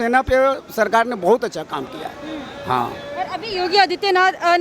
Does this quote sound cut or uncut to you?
uncut